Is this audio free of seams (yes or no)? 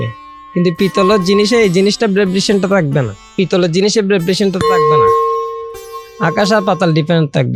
yes